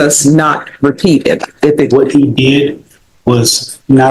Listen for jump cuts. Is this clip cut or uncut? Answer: cut